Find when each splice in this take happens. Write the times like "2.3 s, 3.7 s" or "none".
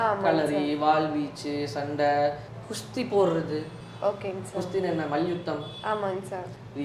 none